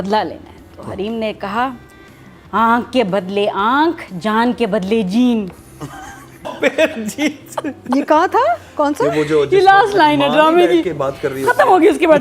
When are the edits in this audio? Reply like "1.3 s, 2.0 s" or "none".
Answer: 6.5 s